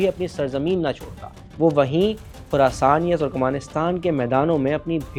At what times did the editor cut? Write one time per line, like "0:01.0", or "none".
none

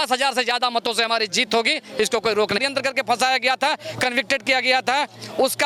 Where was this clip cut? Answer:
0:02.6

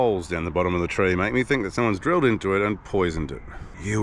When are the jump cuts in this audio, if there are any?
none

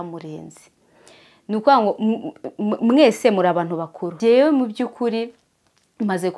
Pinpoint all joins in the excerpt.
0:04.1

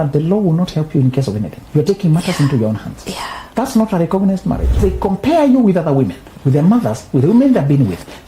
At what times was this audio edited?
0:01.6
0:03.4
0:04.8

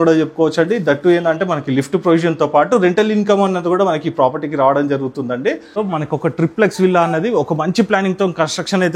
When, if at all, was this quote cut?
0:05.8

